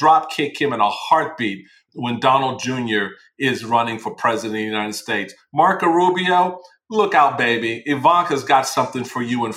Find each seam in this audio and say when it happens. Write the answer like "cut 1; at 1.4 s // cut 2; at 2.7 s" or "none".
cut 1; at 1.8 s